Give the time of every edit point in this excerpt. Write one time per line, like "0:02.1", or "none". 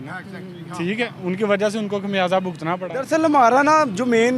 0:02.9